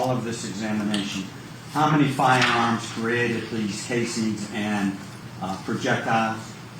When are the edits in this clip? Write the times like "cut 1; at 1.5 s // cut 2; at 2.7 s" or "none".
cut 1; at 5.2 s